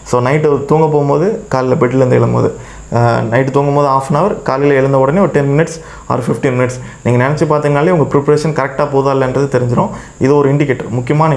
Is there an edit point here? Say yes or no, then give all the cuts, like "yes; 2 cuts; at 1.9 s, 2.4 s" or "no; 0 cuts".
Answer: no; 0 cuts